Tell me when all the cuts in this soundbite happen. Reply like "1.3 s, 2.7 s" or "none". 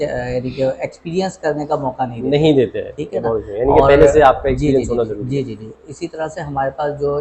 none